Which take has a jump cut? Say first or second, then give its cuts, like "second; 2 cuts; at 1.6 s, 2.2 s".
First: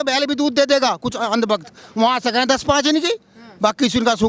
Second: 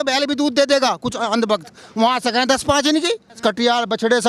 second; 1 cut; at 3.4 s